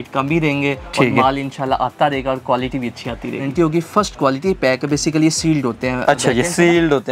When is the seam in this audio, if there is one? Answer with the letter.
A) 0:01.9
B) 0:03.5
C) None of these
B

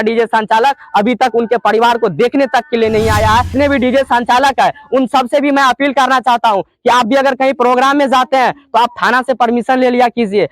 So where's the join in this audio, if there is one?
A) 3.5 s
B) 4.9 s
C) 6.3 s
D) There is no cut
A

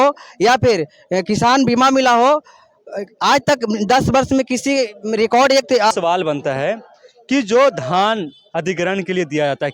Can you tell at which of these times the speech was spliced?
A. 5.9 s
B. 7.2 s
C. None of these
A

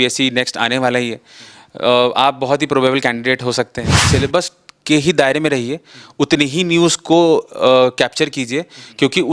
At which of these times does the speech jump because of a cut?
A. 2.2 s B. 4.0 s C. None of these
B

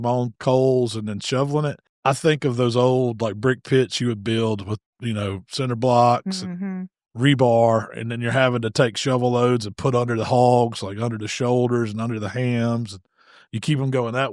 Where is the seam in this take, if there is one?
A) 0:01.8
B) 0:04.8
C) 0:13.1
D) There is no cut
A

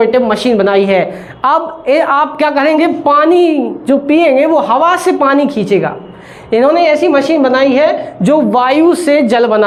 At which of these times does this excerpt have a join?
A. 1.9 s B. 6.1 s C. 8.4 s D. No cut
D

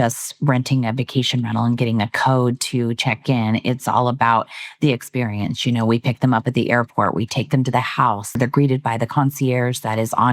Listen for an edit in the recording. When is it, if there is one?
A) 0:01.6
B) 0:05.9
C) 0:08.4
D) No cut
C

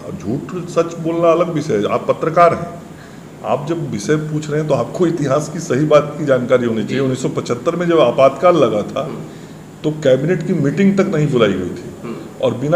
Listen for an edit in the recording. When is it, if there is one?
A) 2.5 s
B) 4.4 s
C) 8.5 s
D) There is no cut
D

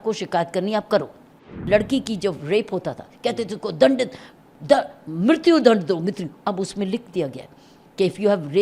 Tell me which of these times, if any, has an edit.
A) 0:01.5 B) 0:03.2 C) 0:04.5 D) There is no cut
A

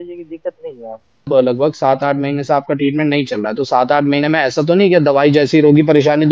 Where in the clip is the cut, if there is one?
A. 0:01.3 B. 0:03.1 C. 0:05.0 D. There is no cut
A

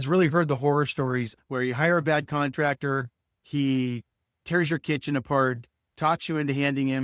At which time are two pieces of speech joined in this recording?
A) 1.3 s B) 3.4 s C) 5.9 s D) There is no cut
A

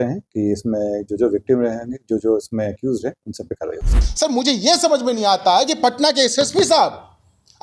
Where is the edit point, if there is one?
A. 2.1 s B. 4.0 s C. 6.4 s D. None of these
B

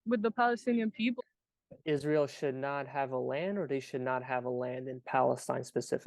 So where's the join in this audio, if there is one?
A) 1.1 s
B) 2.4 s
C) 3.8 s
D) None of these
A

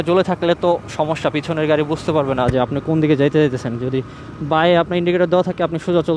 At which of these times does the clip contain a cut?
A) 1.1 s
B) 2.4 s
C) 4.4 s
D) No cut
D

